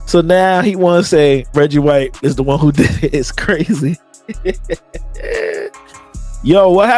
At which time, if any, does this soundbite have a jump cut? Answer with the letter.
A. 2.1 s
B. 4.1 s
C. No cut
A